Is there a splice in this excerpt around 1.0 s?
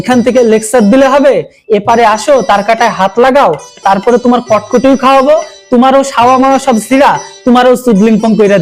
no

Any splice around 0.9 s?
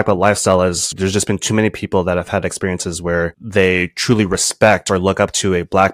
yes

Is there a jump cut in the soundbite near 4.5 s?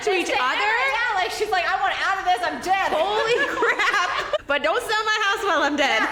no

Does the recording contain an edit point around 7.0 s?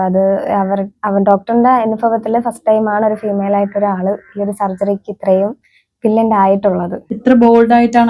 yes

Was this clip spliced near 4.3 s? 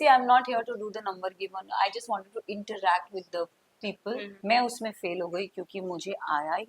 yes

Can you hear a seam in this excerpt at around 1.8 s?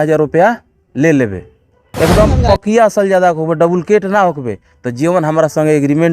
yes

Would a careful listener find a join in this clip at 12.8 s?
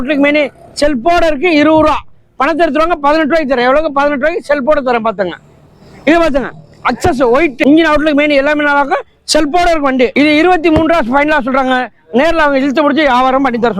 no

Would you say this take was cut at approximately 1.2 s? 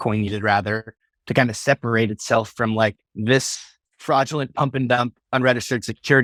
no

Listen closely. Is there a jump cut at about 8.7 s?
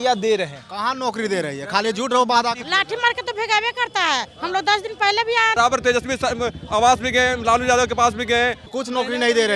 yes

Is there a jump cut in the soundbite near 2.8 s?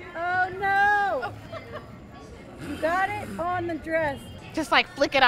no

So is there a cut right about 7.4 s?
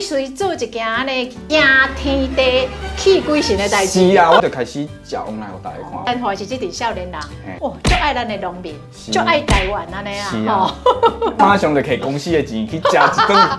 yes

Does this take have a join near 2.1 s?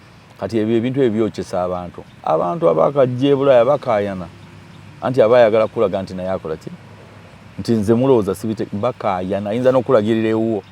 yes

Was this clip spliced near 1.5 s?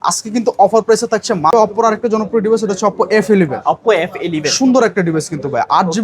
yes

